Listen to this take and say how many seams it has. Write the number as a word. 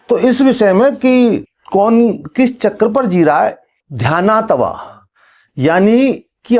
one